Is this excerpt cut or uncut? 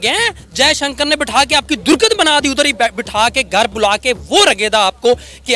uncut